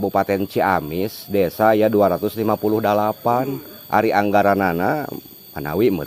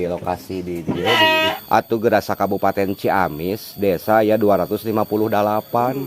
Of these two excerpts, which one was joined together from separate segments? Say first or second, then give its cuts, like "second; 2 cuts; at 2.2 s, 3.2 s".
second; 1 cut; at 1.5 s